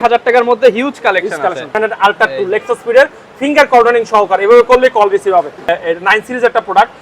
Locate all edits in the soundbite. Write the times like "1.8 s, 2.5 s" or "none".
1.7 s, 5.7 s

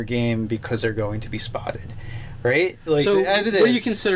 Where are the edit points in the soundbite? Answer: 3.2 s

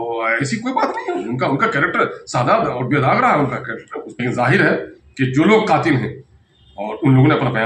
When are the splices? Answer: 4.0 s

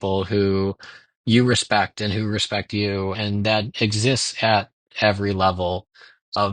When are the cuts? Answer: 3.2 s

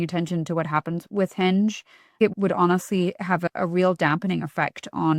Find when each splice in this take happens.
1.0 s, 2.3 s, 3.4 s

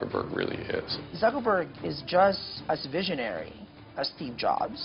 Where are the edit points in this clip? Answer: 1.0 s, 2.5 s

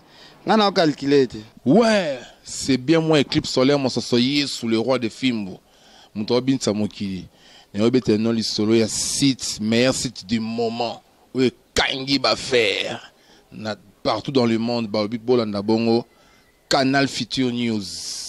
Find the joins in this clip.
1.5 s

